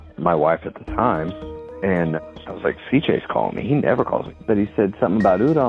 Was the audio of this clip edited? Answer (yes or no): yes